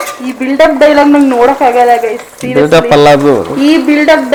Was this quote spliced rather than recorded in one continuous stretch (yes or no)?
no